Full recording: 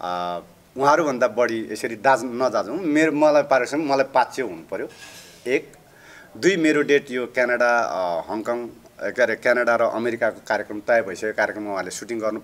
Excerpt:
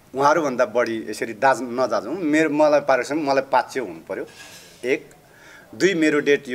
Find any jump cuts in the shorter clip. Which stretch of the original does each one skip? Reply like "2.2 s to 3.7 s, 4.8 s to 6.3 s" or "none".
none